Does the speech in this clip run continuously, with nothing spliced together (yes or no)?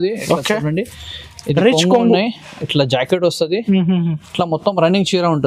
yes